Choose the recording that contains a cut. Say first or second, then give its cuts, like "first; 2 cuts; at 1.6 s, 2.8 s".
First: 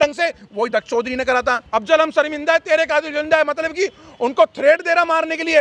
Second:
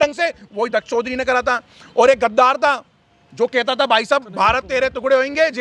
first; 1 cut; at 1.6 s